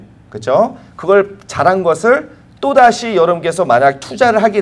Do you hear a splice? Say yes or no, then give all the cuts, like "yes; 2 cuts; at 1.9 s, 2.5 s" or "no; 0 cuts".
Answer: no; 0 cuts